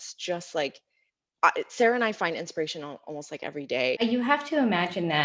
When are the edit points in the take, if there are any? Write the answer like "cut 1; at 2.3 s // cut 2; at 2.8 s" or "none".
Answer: cut 1; at 4.0 s